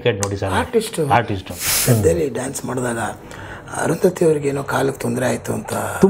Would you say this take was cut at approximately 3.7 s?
no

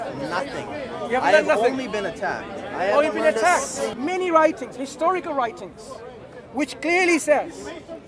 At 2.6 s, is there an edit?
no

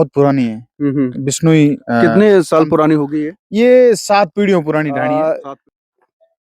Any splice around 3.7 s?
no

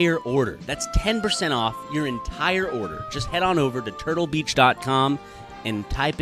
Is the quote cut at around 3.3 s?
no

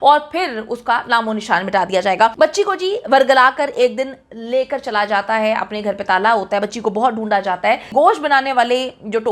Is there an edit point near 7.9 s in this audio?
yes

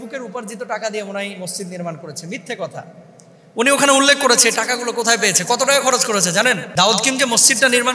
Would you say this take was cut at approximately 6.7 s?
yes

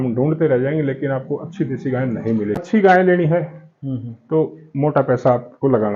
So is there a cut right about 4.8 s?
no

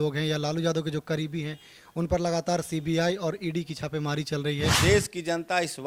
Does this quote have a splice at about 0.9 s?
no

